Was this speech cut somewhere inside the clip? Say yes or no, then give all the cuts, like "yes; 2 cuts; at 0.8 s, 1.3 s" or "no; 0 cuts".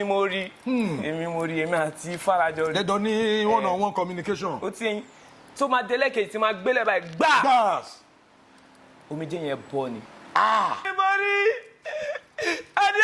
yes; 1 cut; at 10.9 s